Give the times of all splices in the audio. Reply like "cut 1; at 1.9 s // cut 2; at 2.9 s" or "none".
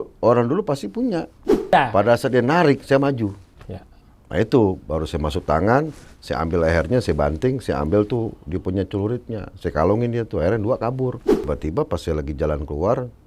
cut 1; at 1.7 s // cut 2; at 11.3 s